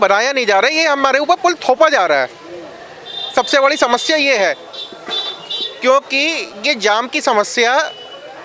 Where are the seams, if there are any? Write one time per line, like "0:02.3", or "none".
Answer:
none

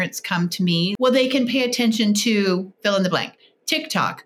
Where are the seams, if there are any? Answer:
0:00.9

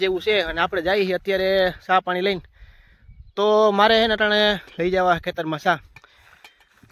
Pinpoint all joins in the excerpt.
none

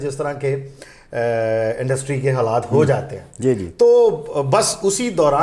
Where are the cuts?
none

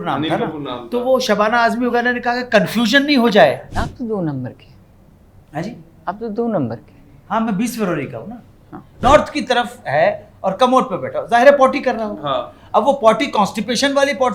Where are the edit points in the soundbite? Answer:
0:03.7
0:09.0

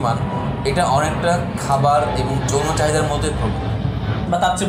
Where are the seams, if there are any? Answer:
none

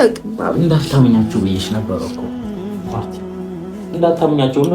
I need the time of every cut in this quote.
0:02.1
0:03.9

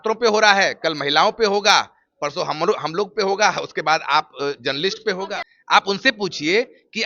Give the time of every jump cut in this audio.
0:05.5

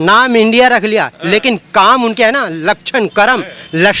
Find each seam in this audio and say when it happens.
none

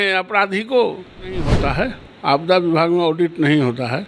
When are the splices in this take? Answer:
0:01.5

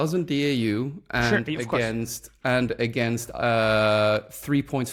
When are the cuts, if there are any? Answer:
none

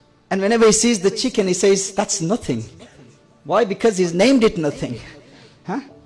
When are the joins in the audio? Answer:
none

